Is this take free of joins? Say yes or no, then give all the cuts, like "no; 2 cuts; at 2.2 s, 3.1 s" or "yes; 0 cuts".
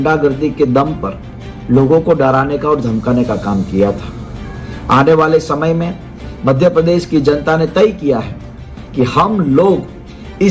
yes; 0 cuts